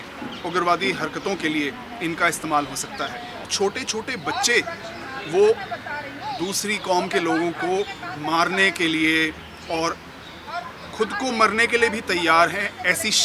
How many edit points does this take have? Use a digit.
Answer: 1